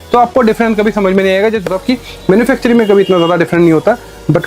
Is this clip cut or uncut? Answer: cut